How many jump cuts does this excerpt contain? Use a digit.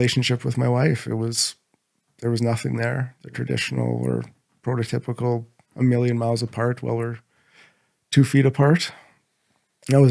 1